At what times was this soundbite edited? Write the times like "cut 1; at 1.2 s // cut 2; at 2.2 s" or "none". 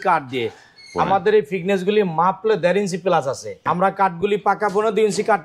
cut 1; at 3.6 s